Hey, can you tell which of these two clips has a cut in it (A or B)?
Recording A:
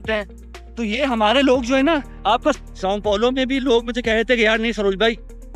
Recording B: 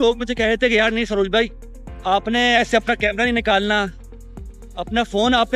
A